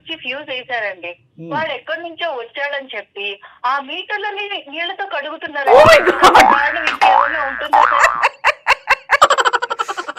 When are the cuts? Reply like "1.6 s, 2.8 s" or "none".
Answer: none